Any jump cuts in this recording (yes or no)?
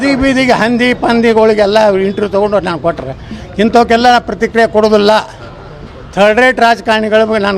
no